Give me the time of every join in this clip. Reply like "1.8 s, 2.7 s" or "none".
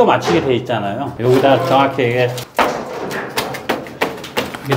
none